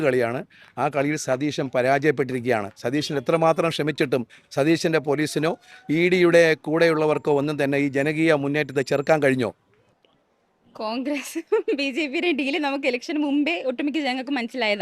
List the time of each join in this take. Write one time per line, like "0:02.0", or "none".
none